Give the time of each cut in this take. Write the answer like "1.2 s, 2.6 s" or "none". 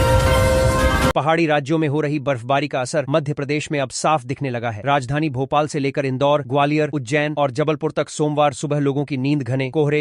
1.1 s